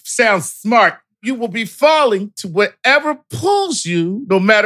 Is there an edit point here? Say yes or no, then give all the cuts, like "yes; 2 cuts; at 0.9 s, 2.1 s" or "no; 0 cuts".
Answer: yes; 1 cut; at 1.1 s